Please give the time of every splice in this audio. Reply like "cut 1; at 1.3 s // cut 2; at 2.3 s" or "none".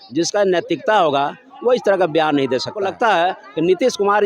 cut 1; at 2.8 s